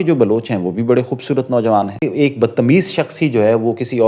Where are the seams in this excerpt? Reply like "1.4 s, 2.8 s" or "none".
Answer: 2.0 s